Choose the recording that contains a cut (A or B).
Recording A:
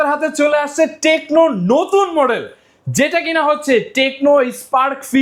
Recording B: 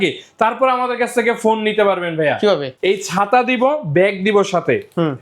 B